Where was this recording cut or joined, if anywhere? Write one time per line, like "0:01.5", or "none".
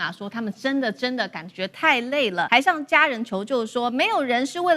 0:02.5